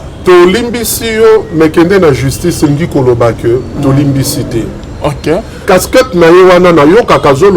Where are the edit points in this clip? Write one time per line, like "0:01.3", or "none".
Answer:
0:05.6